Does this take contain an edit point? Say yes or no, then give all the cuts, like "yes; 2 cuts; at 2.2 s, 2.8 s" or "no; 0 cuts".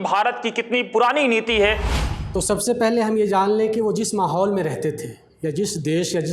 yes; 1 cut; at 1.9 s